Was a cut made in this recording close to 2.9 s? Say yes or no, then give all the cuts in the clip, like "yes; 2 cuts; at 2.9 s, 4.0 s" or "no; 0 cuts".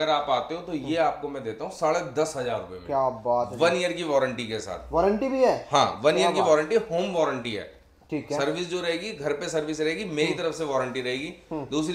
no; 0 cuts